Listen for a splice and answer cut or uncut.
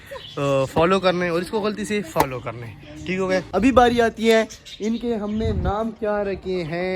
cut